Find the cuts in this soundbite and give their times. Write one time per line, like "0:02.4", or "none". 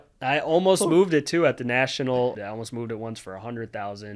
0:02.4